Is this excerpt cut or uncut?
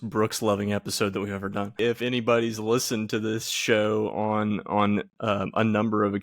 cut